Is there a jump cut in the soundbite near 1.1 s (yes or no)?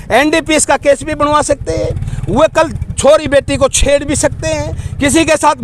no